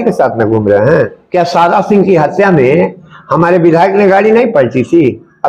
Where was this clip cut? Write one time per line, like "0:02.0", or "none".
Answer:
0:01.2